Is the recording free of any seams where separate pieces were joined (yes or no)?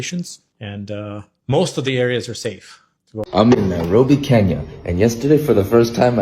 no